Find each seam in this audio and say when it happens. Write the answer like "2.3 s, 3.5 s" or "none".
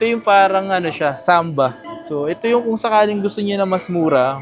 none